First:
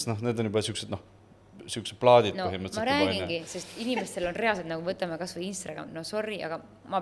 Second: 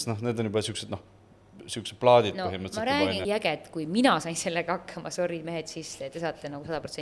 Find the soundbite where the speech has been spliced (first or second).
second